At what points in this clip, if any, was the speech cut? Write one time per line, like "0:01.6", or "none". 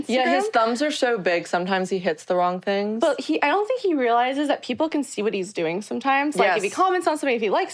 none